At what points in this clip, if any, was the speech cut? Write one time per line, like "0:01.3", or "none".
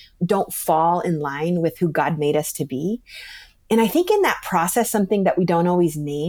none